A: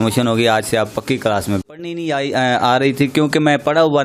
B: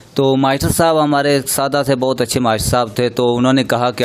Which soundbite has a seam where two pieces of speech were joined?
A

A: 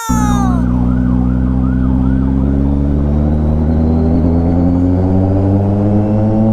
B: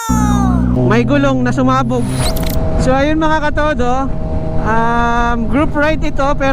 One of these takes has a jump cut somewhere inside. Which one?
B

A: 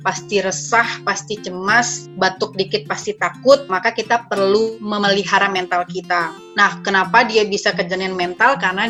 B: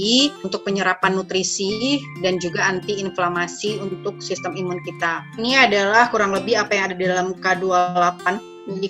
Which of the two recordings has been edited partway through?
B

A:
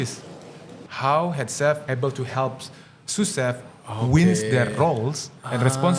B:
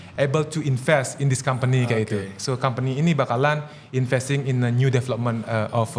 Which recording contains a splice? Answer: A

